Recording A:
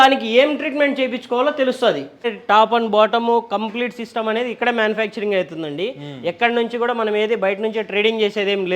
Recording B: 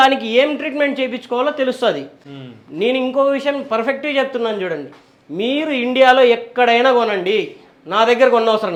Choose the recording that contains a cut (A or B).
A